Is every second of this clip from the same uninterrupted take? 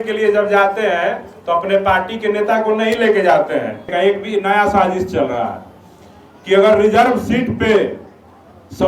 no; 1 cut; at 3.8 s

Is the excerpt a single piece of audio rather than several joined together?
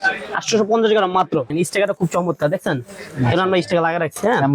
no; 1 cut; at 1.5 s

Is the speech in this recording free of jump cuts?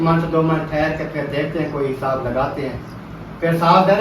yes; 0 cuts

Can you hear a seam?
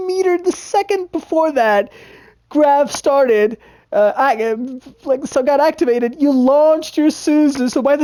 no; 0 cuts

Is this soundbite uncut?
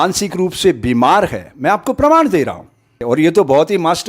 no; 1 cut; at 3.0 s

